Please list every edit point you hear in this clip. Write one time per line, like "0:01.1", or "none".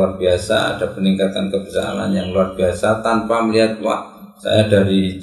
none